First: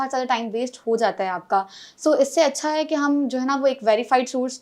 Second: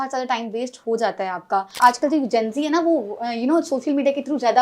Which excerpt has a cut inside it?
second; 1 cut; at 1.8 s

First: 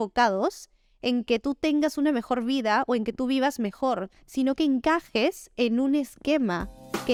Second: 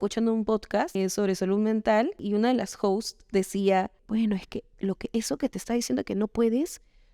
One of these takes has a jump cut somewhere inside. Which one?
second; 3 cuts; at 1.0 s, 2.2 s, 4.0 s

